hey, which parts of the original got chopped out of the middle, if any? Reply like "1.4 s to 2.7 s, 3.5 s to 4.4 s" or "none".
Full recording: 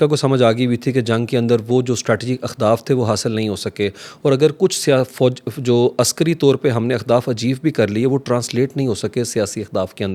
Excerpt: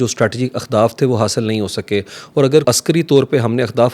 4.5 s to 6.0 s